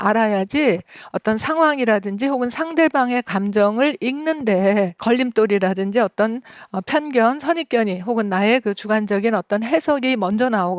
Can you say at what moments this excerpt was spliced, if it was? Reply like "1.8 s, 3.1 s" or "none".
5.0 s